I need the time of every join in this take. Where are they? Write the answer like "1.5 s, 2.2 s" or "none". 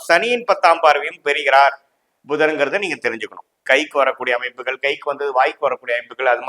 3.6 s